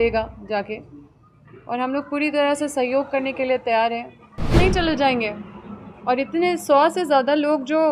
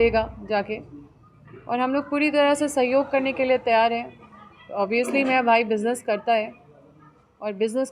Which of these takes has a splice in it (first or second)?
first